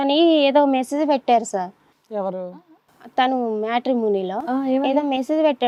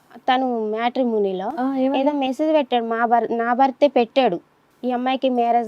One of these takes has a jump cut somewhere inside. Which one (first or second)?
second